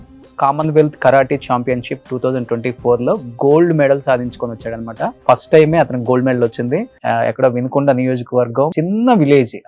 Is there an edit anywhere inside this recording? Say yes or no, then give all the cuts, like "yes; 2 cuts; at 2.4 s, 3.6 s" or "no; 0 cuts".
yes; 3 cuts; at 5.2 s, 6.9 s, 8.7 s